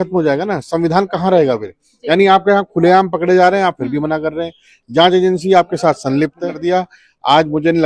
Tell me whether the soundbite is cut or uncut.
cut